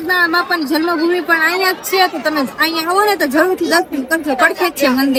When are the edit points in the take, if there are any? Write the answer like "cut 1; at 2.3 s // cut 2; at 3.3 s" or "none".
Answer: none